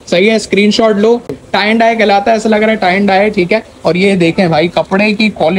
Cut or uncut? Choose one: cut